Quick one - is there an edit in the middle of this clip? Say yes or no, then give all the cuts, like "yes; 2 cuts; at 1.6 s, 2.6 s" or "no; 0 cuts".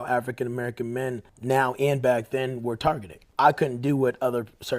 yes; 2 cuts; at 1.3 s, 3.2 s